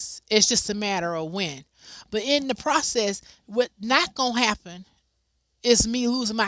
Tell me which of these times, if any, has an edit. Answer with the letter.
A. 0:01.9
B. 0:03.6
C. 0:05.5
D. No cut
D